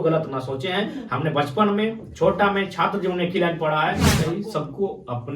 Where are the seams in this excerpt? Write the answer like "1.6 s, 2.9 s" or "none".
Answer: 4.1 s

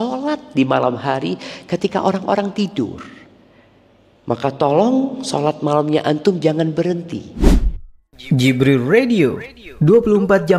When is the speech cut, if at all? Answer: 7.3 s

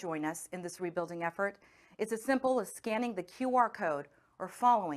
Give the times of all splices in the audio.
none

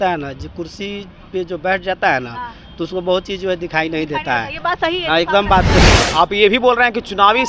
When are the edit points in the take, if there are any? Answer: 5.8 s

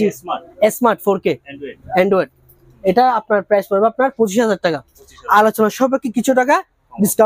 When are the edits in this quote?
none

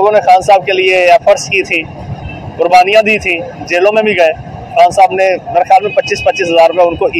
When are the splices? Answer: none

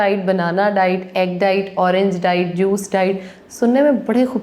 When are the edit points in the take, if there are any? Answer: none

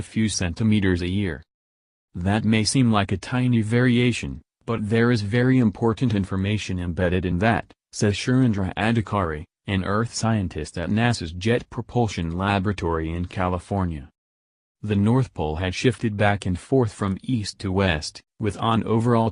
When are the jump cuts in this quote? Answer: none

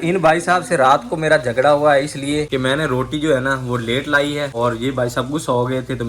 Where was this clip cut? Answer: none

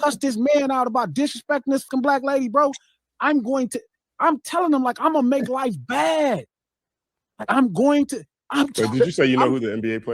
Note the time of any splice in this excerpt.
1.9 s

